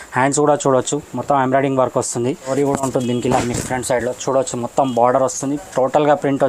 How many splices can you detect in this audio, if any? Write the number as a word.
one